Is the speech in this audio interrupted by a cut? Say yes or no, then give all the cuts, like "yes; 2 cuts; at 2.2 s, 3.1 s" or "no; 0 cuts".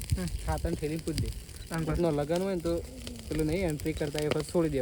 no; 0 cuts